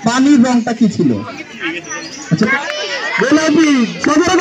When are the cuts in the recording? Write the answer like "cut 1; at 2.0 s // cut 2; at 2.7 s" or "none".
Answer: cut 1; at 1.4 s // cut 2; at 2.5 s